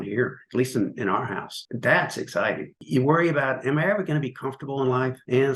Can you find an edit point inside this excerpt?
yes; 2 cuts; at 1.6 s, 2.8 s

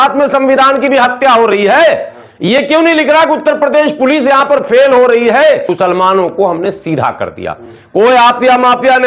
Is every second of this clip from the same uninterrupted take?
no; 1 cut; at 5.7 s

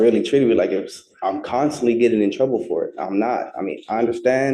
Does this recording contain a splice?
no; 0 cuts

